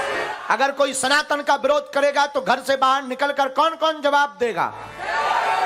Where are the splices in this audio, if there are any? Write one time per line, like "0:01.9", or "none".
0:01.0